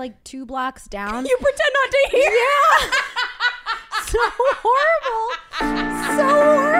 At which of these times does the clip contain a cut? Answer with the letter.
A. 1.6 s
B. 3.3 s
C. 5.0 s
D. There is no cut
D